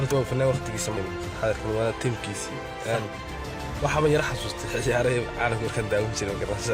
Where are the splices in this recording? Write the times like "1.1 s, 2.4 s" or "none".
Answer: 1.0 s